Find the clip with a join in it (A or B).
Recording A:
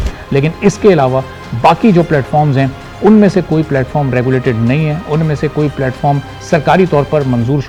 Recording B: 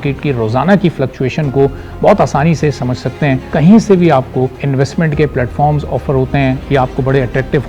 B